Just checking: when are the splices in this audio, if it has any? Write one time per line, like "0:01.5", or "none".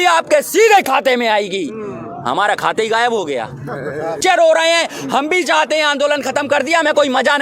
0:04.2